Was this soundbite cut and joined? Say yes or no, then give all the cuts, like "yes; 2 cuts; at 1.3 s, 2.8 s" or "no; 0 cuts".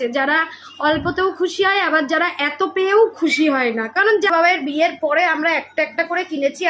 yes; 1 cut; at 4.3 s